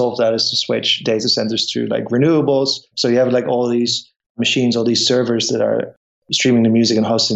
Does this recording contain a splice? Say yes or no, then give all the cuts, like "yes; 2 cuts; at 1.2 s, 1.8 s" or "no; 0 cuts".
yes; 1 cut; at 2.9 s